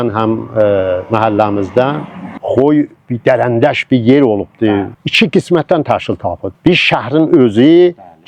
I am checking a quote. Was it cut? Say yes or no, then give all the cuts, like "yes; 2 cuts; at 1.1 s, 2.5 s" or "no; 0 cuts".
yes; 2 cuts; at 2.4 s, 4.9 s